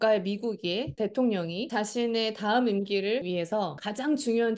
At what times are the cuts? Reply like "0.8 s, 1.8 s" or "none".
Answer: 0.9 s, 1.6 s, 3.4 s